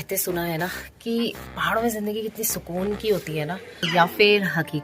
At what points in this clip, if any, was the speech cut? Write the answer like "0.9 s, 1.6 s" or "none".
3.9 s